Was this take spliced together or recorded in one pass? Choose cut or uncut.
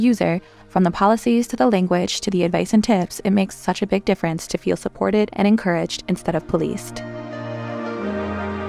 cut